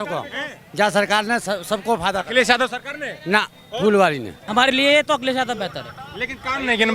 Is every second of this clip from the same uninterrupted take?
no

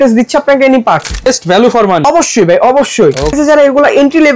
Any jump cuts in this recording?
yes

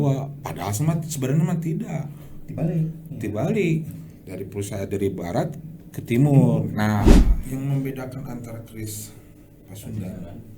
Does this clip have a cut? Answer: yes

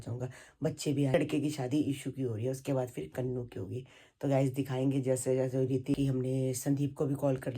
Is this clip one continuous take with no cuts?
no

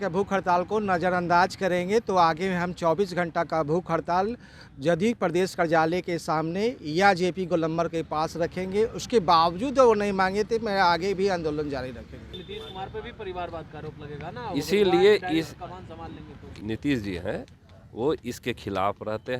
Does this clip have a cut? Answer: yes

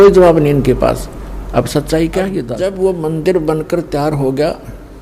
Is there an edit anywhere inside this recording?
yes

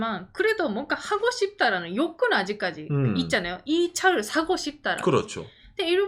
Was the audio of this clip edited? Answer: no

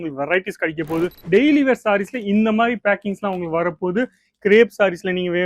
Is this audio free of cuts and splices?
no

